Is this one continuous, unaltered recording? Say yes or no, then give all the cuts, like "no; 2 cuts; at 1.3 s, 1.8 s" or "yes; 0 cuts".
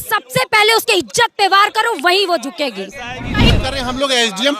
no; 1 cut; at 3.5 s